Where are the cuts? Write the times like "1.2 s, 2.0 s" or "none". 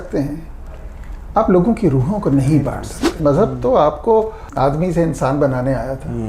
3.2 s, 4.4 s